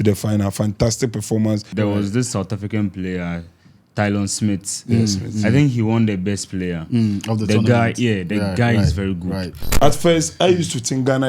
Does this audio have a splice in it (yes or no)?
yes